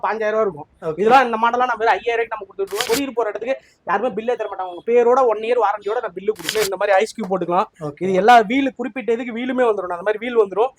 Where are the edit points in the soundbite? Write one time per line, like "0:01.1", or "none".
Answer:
0:02.8
0:06.5